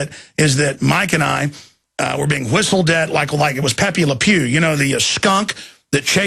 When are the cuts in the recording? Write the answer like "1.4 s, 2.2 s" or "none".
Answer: none